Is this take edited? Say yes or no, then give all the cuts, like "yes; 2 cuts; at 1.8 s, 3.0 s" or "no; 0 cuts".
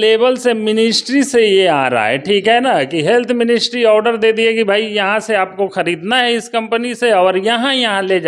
no; 0 cuts